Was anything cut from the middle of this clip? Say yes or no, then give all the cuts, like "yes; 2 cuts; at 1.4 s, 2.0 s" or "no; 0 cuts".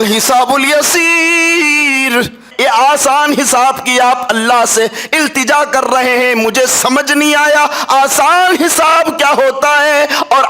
yes; 1 cut; at 2.5 s